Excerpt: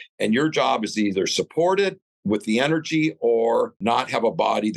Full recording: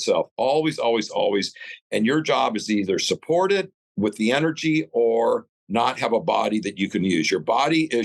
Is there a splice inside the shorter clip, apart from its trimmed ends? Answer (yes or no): yes